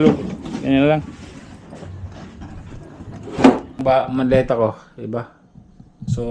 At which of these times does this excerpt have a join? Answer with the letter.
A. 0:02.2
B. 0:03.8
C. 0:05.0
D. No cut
B